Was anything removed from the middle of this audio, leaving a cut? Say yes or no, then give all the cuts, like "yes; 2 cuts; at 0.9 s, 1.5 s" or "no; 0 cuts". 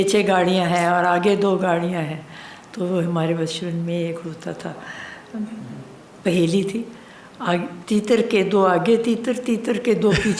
no; 0 cuts